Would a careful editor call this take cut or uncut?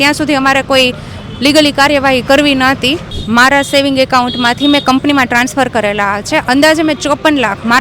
cut